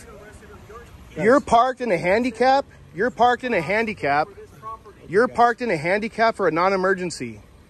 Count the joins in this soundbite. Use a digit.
0